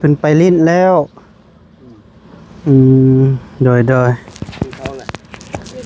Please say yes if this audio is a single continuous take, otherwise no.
yes